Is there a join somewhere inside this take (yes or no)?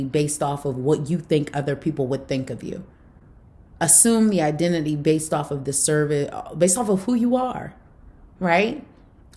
no